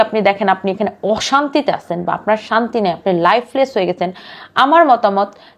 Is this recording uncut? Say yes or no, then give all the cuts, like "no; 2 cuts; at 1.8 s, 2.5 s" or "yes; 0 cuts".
yes; 0 cuts